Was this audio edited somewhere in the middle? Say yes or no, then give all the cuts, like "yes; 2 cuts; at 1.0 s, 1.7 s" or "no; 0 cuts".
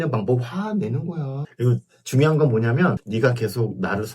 yes; 1 cut; at 3.0 s